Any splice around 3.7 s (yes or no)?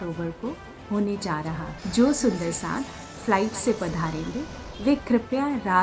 no